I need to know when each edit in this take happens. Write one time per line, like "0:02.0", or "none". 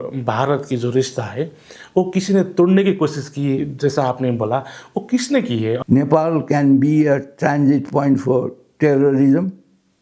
0:05.8